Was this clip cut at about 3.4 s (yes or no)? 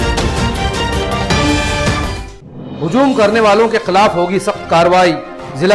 no